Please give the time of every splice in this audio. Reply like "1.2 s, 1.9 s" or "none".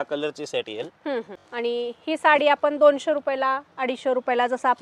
1.4 s